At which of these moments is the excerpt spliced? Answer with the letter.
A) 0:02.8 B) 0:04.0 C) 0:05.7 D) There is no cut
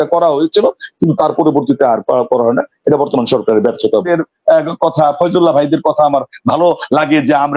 B